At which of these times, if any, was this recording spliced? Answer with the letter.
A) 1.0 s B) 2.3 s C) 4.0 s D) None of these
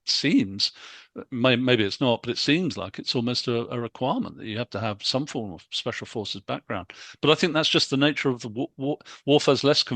D